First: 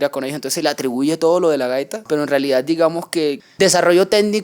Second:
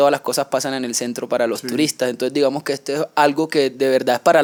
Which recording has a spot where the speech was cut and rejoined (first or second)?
first